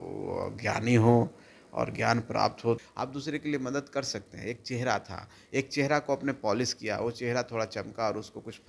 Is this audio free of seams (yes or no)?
no